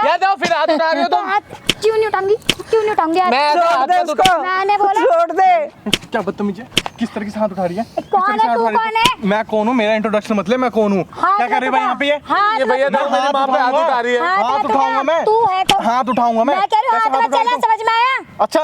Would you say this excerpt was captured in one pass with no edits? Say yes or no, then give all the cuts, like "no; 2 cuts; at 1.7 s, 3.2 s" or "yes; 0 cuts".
yes; 0 cuts